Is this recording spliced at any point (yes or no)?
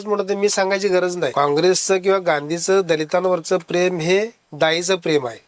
yes